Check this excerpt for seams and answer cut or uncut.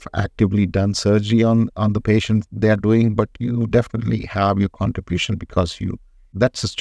uncut